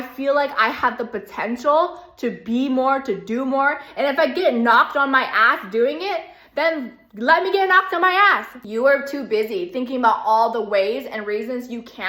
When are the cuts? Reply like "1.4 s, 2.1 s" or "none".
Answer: 8.5 s